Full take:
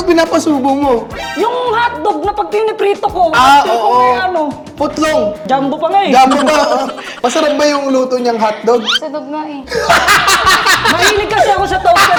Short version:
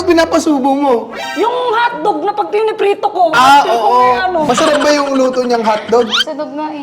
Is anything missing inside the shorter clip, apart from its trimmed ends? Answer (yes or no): yes